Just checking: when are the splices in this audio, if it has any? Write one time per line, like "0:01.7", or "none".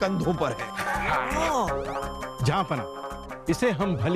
none